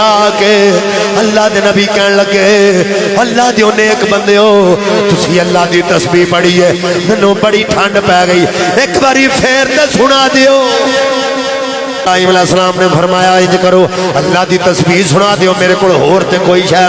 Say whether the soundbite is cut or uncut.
cut